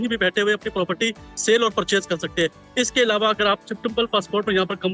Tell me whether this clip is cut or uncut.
uncut